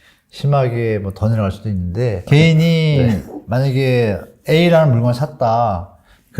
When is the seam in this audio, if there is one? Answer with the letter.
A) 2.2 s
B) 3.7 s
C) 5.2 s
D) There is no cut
A